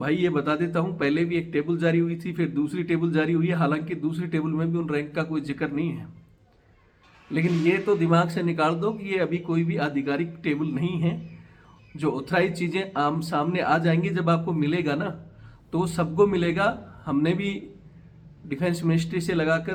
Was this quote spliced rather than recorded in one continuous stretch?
no; 0 cuts

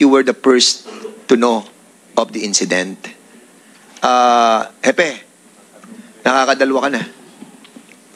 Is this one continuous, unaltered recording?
yes; 0 cuts

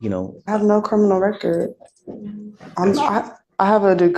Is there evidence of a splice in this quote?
no; 0 cuts

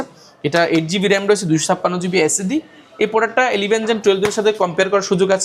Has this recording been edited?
no; 0 cuts

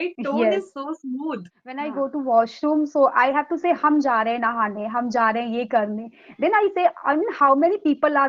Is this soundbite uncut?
no; 1 cut; at 1.9 s

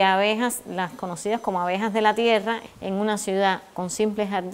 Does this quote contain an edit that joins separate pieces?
yes; 1 cut; at 2.7 s

